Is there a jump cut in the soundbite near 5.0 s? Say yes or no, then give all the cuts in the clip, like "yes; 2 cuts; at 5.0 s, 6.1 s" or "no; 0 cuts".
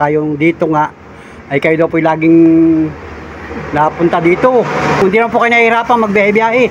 yes; 1 cut; at 5.0 s